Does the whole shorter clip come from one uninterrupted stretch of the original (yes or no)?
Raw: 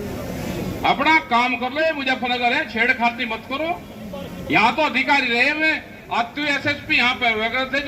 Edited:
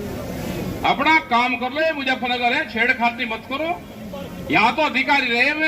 yes